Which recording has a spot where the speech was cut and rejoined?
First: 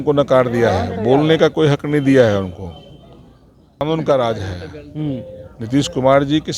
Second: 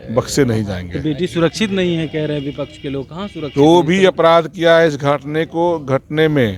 first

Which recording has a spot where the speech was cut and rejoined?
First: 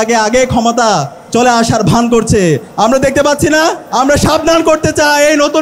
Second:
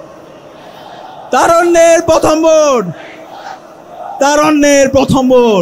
first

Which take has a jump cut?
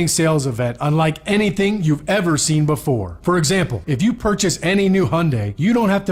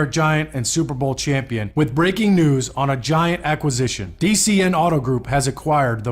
first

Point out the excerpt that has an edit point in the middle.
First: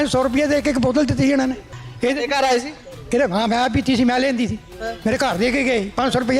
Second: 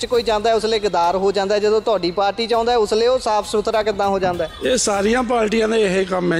first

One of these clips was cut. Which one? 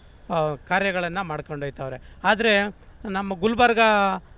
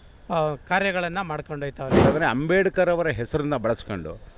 second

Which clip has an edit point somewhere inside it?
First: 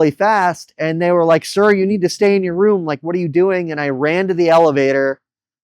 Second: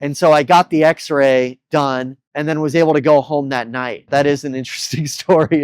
second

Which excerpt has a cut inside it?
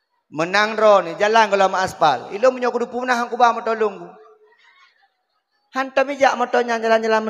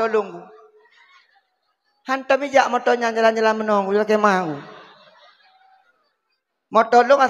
second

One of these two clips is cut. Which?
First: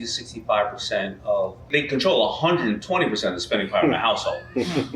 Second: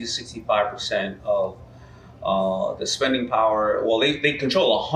first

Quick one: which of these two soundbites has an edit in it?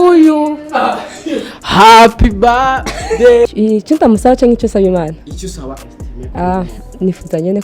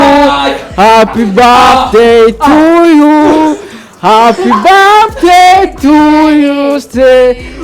first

